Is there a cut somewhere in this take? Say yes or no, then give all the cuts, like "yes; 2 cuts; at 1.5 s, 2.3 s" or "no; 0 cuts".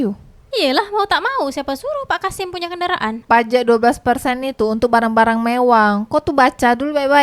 yes; 1 cut; at 3.2 s